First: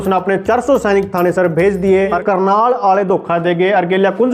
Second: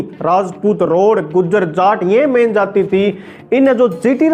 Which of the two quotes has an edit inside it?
first; 1 cut; at 2.2 s

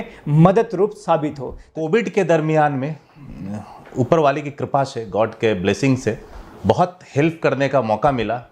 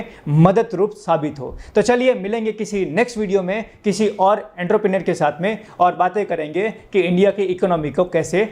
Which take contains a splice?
first; 1 cut; at 1.7 s

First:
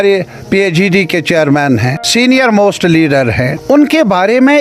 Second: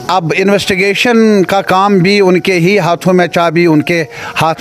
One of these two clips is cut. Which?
first; 2 cuts; at 2.0 s, 3.5 s

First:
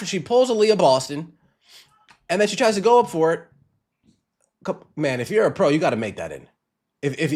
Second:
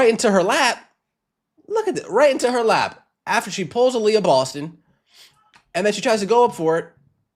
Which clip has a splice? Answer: first; 1 cut; at 6.2 s

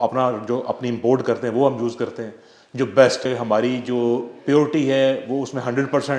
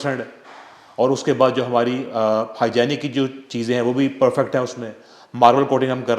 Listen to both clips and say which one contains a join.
first; 1 cut; at 3.3 s

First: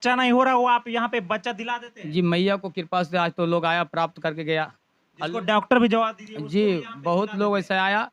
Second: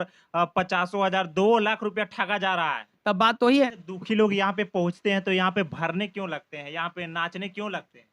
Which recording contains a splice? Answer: second; 1 cut; at 3.7 s

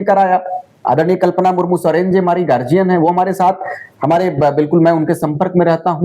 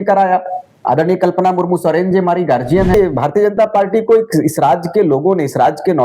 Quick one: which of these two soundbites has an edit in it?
second; 1 cut; at 2.9 s

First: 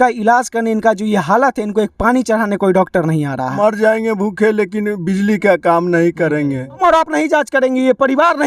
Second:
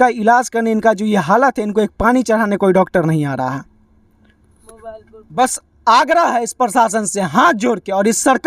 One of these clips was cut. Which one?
first; 2 cuts; at 3.6 s, 6.8 s

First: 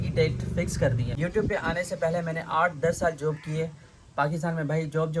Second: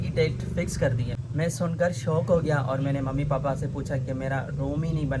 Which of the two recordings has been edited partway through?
first; 1 cut; at 1.1 s

